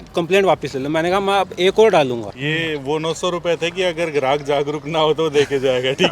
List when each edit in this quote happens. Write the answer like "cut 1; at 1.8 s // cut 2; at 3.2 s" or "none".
cut 1; at 2.3 s